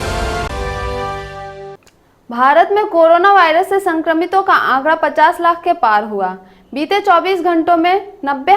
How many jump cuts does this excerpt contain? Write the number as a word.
one